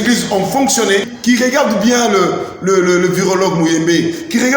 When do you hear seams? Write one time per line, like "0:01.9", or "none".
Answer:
0:01.1